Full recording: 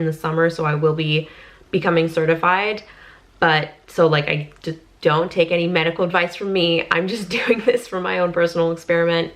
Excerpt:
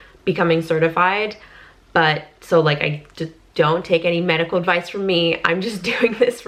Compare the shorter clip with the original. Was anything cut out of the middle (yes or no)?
no